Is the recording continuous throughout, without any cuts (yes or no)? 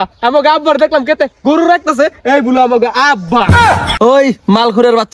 yes